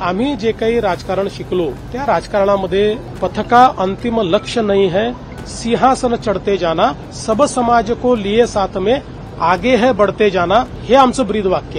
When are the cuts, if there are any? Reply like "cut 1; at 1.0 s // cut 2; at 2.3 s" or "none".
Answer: cut 1; at 1.9 s // cut 2; at 3.1 s // cut 3; at 7.1 s // cut 4; at 10.8 s